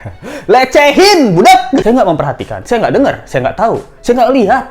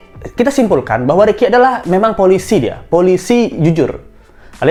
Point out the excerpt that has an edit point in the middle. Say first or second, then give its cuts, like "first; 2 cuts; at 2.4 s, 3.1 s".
first; 1 cut; at 1.8 s